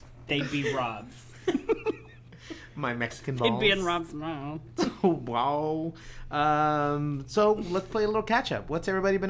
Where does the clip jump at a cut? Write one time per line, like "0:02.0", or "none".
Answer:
none